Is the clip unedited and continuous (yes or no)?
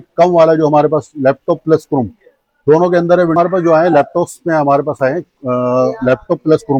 yes